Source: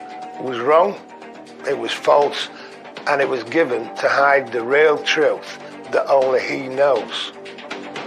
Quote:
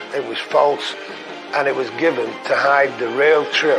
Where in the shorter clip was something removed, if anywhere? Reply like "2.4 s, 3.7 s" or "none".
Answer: none